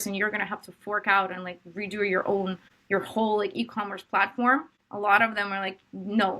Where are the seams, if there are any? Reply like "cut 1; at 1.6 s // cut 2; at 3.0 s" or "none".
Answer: cut 1; at 2.7 s // cut 2; at 4.8 s